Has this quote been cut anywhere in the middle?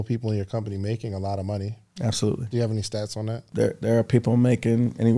yes; 1 cut; at 3.5 s

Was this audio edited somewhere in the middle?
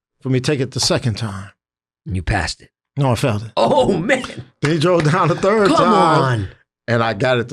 no; 0 cuts

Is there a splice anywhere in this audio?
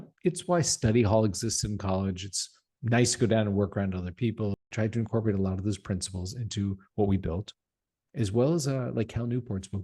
yes; 1 cut; at 4.6 s

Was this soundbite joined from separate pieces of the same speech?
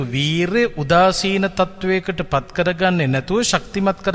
no; 0 cuts

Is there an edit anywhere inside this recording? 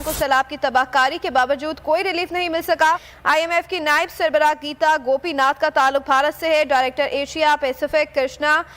yes; 1 cut; at 3.1 s

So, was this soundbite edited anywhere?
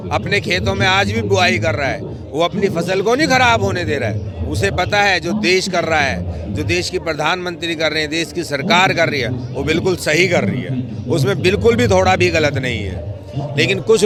no; 0 cuts

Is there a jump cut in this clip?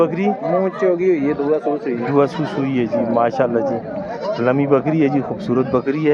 no; 0 cuts

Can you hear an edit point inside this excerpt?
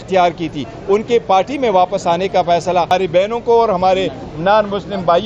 yes; 1 cut; at 2.9 s

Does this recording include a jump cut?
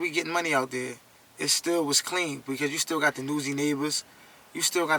no; 0 cuts

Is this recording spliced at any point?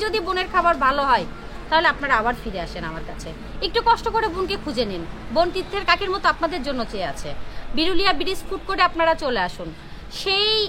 no; 0 cuts

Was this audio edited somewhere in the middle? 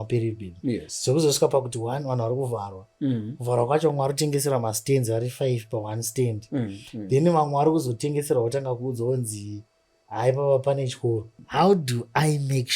yes; 1 cut; at 11.4 s

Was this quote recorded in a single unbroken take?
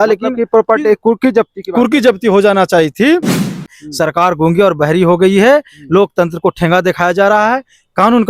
no; 1 cut; at 3.8 s

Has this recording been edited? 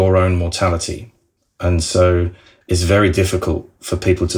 yes; 1 cut; at 1.1 s

